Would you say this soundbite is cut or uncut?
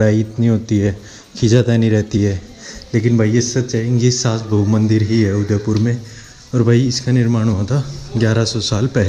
cut